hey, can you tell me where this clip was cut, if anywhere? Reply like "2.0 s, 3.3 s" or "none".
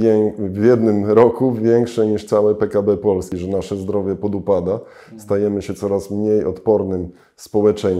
3.3 s